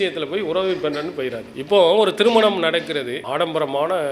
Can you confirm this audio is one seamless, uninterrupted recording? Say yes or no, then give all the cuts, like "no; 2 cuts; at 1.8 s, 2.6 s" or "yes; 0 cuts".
no; 1 cut; at 3.2 s